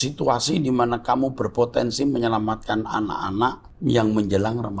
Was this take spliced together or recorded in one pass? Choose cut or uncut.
cut